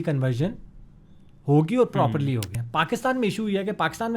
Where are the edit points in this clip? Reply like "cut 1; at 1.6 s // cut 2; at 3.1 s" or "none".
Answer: cut 1; at 2.6 s